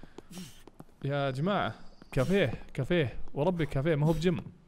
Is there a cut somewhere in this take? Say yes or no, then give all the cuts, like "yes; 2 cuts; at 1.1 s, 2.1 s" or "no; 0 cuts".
no; 0 cuts